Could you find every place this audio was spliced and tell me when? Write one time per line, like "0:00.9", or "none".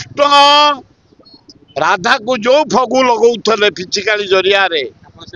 none